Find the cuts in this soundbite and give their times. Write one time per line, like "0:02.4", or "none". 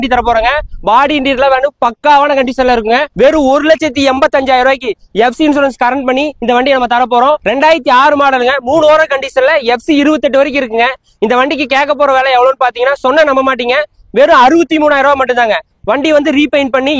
0:03.1
0:07.4